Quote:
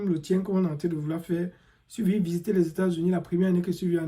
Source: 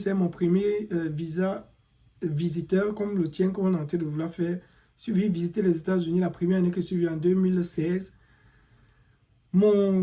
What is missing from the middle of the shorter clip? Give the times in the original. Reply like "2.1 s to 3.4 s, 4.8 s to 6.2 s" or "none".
none